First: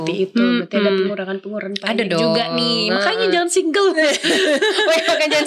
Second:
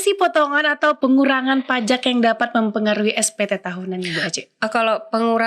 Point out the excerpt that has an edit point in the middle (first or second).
second